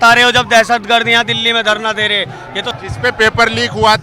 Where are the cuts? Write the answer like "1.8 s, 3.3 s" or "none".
2.7 s